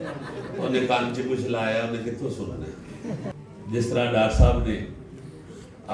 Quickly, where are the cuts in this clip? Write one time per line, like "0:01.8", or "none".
0:03.3